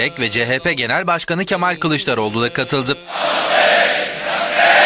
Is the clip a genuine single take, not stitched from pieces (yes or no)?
yes